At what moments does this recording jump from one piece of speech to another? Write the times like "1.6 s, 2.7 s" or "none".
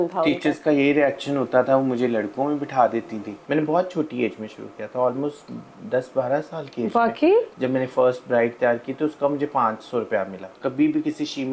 3.3 s, 7.5 s, 10.5 s